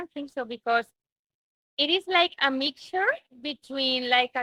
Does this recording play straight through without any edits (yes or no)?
yes